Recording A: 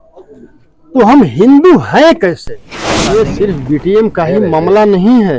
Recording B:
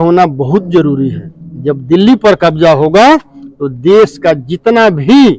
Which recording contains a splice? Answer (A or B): A